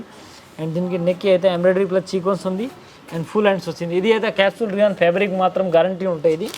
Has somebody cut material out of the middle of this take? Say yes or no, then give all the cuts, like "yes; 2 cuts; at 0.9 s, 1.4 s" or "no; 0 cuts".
no; 0 cuts